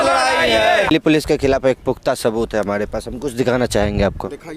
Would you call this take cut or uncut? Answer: cut